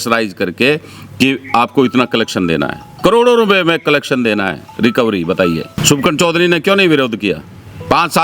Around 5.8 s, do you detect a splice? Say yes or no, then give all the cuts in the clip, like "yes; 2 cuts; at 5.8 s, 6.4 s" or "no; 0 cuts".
yes; 1 cut; at 5.8 s